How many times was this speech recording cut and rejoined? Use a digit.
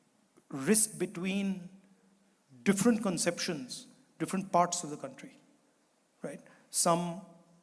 0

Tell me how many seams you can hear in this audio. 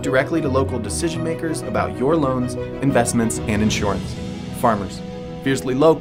0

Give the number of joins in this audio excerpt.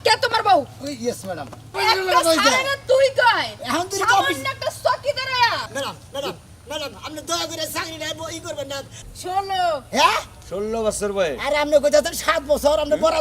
3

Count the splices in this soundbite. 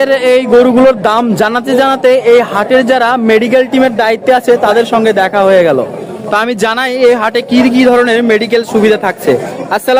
0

